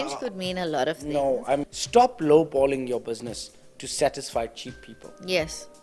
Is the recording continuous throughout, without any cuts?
no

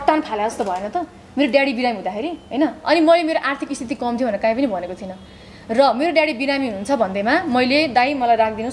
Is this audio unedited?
yes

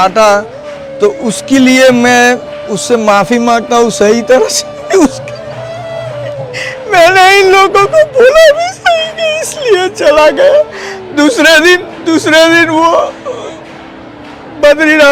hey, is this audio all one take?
yes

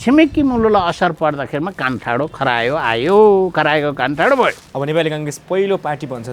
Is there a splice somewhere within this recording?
yes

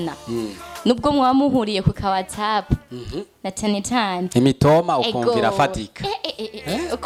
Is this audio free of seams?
yes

